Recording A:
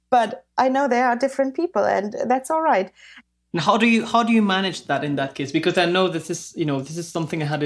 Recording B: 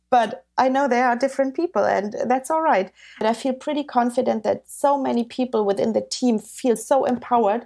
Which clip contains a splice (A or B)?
B